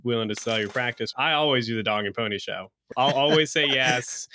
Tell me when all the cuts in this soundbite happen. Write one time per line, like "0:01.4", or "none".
0:01.1
0:02.8